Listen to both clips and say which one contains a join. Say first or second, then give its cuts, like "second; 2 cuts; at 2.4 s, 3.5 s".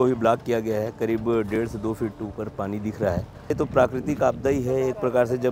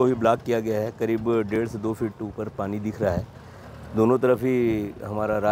first; 1 cut; at 3.5 s